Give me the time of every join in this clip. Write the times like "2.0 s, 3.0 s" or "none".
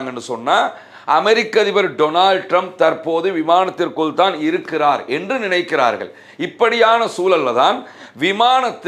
none